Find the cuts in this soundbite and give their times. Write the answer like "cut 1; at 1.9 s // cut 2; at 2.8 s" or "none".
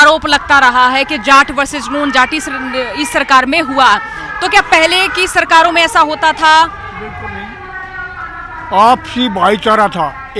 none